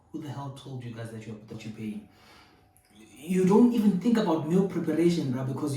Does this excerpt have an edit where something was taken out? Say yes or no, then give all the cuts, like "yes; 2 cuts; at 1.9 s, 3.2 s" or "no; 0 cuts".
yes; 1 cut; at 1.5 s